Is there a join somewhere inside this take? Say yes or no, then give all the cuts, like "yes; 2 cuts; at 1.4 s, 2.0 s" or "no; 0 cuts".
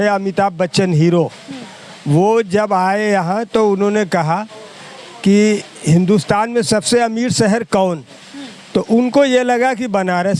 no; 0 cuts